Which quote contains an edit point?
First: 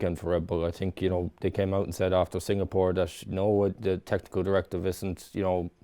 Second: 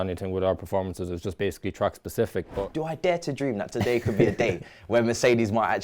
second; 1 cut; at 2.6 s

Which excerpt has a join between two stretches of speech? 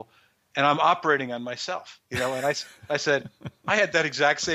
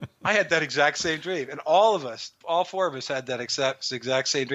second; 1 cut; at 2.3 s

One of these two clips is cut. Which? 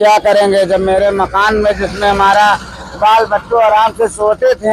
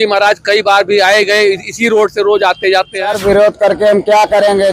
second; 1 cut; at 3.1 s

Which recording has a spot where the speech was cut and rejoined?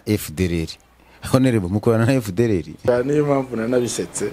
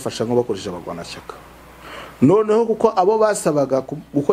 first; 1 cut; at 2.8 s

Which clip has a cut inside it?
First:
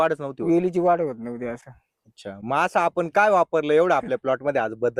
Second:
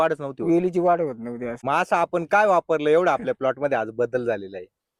second; 1 cut; at 1.5 s

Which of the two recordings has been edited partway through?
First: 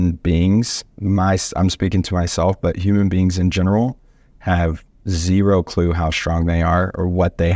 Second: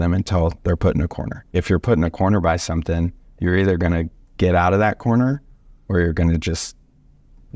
second; 1 cut; at 1.5 s

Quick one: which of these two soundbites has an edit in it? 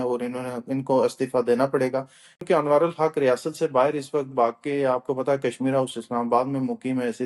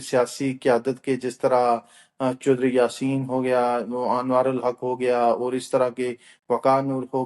first; 1 cut; at 2.4 s

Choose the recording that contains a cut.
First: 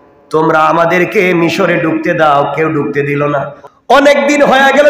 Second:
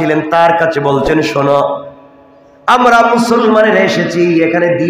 first; 1 cut; at 3.6 s

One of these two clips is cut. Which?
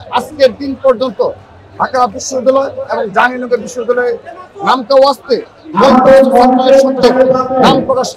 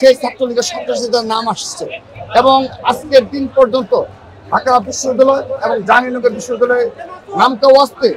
first; 1 cut; at 7.0 s

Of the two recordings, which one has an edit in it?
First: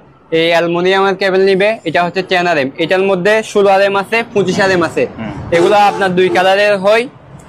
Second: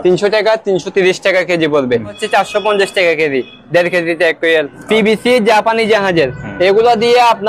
second; 2 cuts; at 2.2 s, 4.8 s

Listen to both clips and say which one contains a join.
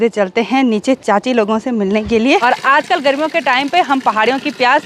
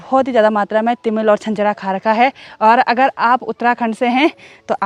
first; 1 cut; at 2.4 s

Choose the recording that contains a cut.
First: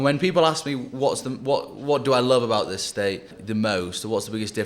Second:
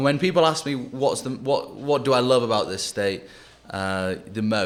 first; 1 cut; at 3.4 s

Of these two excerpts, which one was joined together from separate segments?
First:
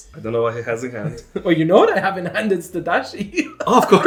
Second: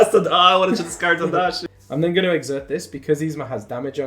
second; 1 cut; at 1.6 s

